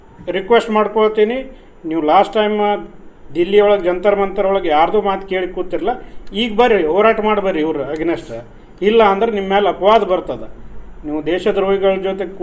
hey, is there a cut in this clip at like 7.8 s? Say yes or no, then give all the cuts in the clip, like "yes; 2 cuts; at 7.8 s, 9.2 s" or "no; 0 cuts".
no; 0 cuts